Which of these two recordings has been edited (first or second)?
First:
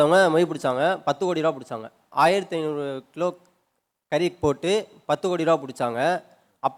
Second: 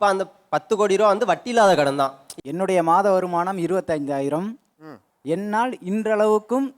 second